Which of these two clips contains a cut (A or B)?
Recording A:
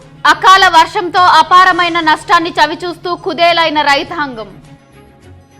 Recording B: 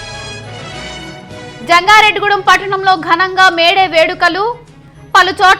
B